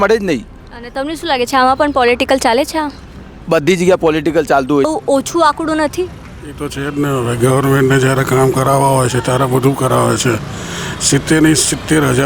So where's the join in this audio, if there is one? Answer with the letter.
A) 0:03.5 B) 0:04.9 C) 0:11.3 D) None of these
B